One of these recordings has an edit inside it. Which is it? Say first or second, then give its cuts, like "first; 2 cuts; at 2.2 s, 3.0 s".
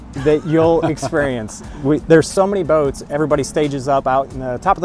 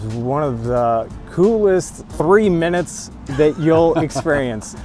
second; 1 cut; at 2.0 s